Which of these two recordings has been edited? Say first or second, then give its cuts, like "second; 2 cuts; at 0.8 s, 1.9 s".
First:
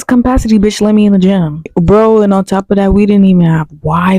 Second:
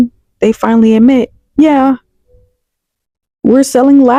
first; 1 cut; at 1.7 s